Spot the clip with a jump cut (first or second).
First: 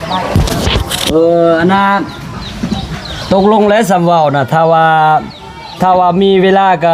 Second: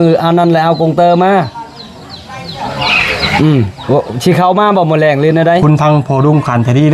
second